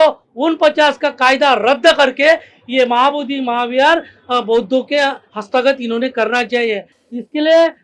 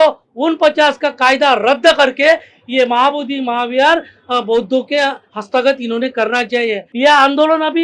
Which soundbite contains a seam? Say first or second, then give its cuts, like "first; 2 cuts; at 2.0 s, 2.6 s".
second; 1 cut; at 6.9 s